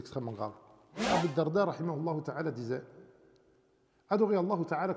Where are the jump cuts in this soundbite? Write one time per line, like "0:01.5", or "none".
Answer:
0:01.1